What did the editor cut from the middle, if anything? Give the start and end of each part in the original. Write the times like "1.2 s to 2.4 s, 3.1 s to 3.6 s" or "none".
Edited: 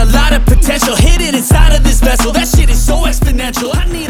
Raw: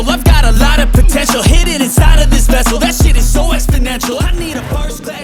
none